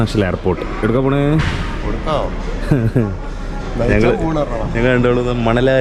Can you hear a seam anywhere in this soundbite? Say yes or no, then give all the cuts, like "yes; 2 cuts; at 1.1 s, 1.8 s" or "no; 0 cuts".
no; 0 cuts